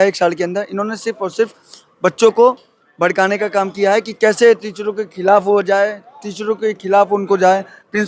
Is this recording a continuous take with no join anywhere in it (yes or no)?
yes